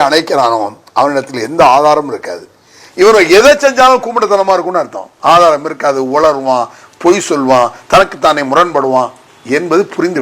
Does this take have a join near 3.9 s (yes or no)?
no